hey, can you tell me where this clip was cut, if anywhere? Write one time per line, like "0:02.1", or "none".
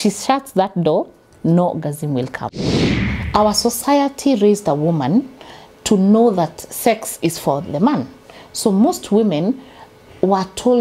0:02.7